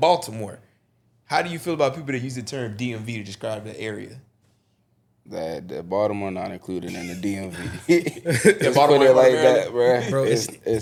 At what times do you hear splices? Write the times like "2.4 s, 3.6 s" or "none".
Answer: none

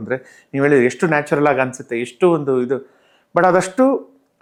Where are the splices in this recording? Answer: none

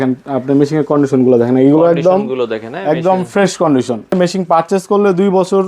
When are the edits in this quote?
4.1 s

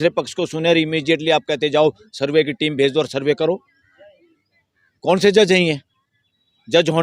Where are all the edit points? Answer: none

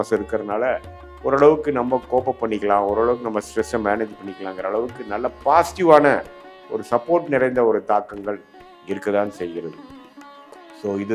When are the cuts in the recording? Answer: none

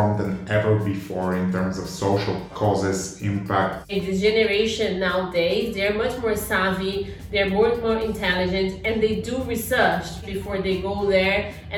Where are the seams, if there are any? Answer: 2.5 s, 3.9 s, 10.2 s

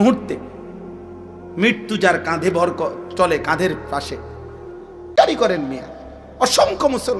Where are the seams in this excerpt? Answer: 5.1 s

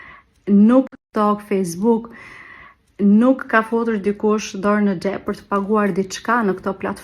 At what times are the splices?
0.9 s, 3.4 s

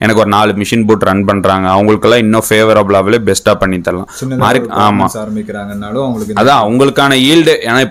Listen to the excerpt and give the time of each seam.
none

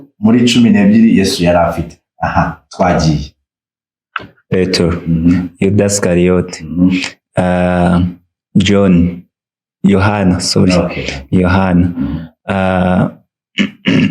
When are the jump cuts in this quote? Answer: 4.5 s

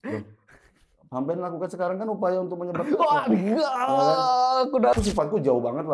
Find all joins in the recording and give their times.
5.0 s

